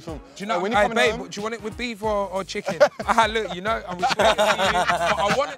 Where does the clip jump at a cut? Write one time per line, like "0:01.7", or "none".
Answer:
none